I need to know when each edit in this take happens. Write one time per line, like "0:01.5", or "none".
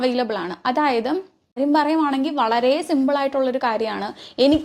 0:01.4